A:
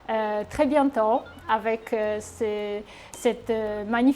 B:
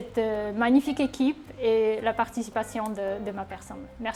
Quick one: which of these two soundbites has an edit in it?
A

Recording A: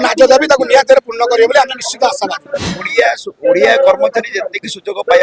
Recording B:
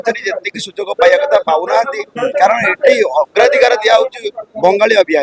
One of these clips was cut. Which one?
A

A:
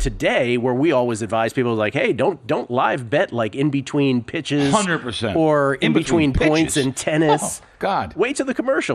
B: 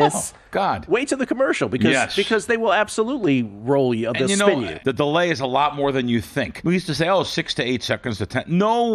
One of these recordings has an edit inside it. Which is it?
B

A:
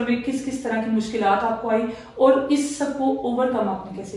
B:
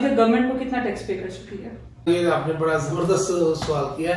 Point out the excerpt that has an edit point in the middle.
B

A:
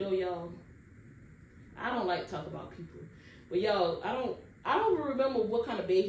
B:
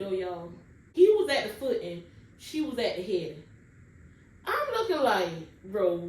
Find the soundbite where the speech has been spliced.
B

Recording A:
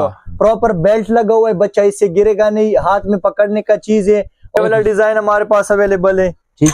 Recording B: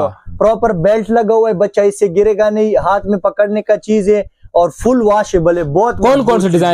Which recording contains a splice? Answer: A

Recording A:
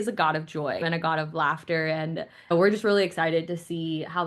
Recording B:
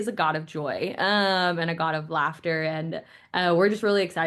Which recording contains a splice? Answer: A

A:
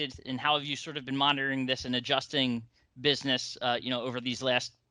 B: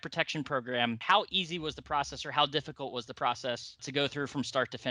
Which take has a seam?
B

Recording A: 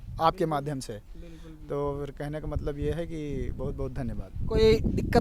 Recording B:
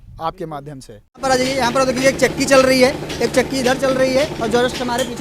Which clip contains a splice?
B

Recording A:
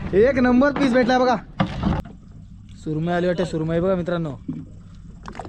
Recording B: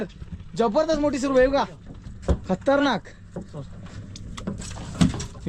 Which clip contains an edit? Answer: A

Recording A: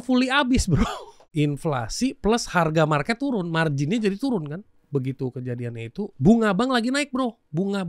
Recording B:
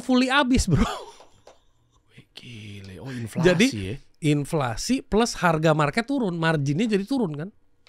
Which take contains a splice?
A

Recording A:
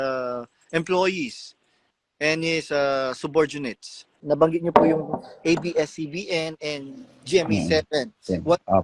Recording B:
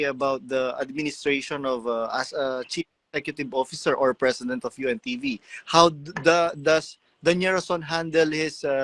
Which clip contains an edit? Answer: A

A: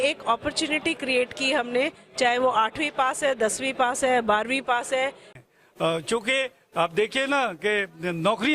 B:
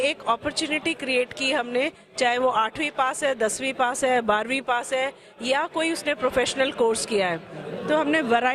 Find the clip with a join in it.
A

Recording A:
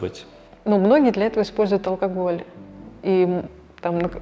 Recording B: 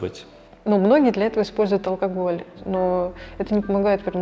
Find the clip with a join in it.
B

